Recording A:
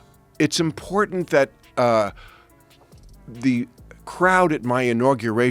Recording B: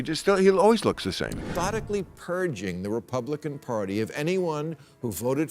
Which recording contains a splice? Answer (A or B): B